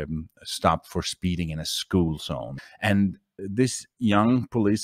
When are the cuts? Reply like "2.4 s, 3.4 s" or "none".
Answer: 2.5 s, 3.4 s